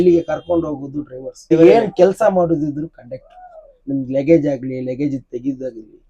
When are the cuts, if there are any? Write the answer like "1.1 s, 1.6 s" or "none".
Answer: 1.5 s